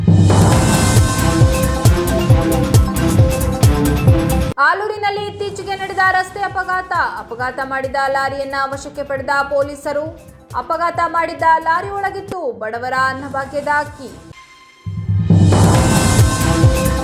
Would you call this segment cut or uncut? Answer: cut